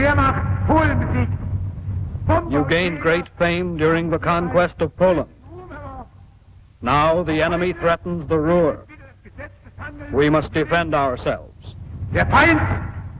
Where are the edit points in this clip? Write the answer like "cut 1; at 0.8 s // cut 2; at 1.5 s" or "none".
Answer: cut 1; at 9.0 s